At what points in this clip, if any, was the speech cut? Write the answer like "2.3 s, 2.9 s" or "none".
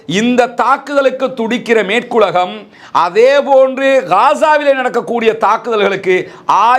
none